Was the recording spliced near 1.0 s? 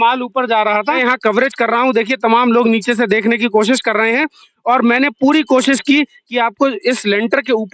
yes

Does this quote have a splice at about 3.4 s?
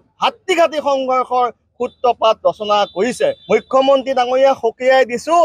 yes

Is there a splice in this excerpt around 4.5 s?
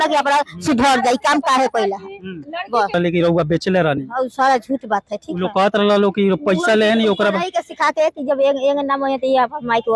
no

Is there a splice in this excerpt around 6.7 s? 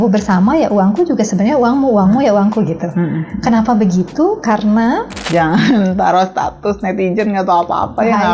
no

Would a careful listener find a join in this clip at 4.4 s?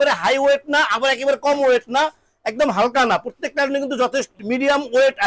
yes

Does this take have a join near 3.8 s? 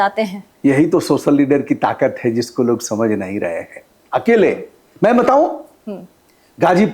no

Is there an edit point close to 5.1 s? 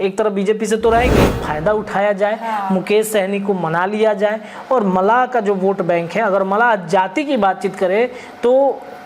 no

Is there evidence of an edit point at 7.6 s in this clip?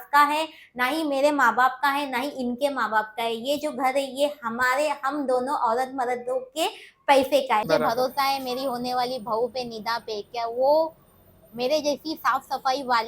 yes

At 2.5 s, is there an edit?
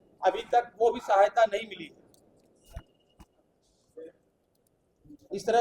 no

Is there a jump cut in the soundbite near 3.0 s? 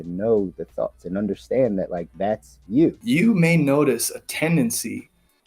yes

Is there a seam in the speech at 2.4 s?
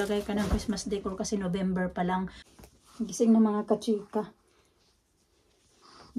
yes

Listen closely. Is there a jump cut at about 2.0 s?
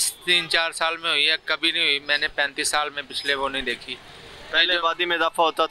no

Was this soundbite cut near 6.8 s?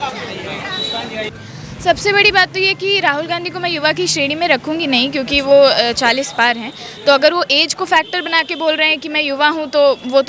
no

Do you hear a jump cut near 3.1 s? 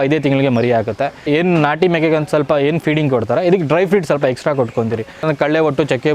no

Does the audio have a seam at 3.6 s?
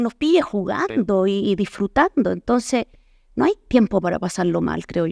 no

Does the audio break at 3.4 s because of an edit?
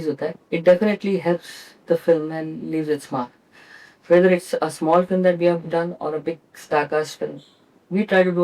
no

